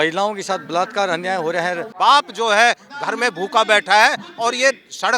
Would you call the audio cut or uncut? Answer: cut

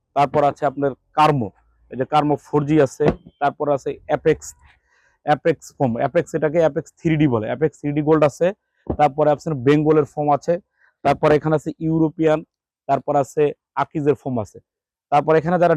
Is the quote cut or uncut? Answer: uncut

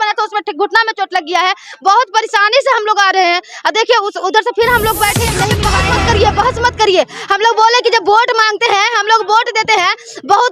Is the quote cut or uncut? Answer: cut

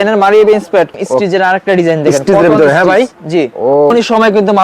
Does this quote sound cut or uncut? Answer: cut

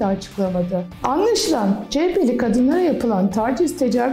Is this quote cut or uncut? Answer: cut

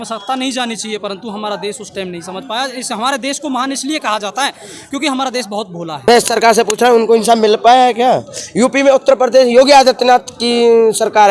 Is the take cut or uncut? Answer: cut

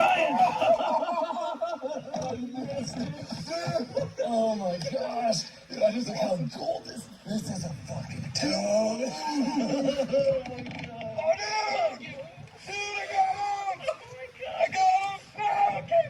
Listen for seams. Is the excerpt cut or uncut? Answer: uncut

